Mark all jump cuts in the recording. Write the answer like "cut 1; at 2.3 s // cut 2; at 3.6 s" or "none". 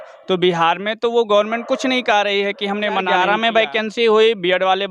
cut 1; at 3.1 s